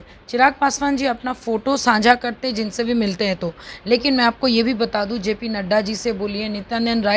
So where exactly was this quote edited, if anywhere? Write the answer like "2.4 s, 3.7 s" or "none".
none